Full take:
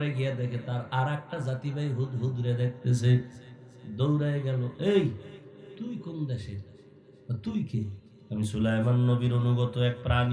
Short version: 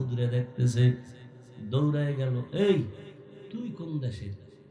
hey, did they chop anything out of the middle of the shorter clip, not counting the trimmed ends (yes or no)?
no